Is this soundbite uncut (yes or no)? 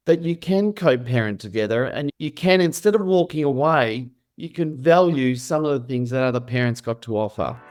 yes